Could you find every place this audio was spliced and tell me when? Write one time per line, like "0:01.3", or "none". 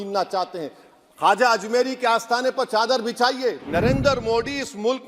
0:03.6